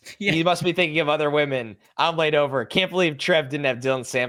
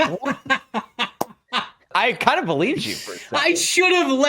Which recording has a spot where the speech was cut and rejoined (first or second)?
second